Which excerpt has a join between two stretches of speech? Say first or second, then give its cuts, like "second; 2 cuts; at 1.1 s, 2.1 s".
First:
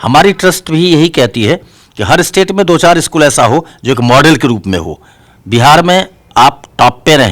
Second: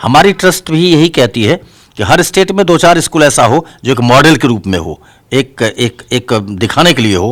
first; 1 cut; at 5.2 s